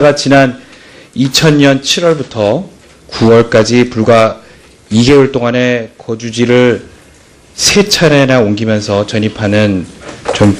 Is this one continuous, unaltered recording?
yes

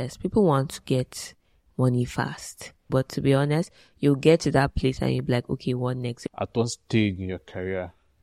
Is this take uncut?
no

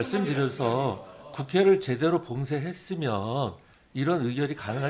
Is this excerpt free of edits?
yes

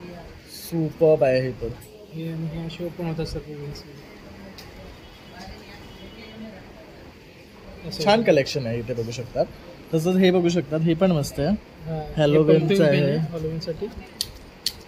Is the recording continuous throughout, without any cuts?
yes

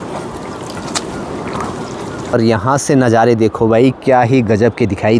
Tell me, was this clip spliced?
yes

